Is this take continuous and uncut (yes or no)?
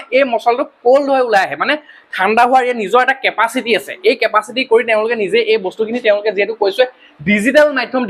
yes